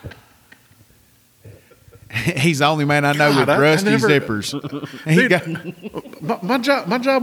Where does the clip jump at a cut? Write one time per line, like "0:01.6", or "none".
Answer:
none